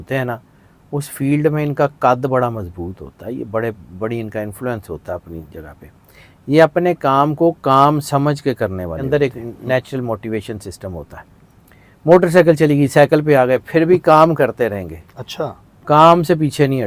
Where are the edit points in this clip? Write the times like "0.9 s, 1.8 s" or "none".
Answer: 9.0 s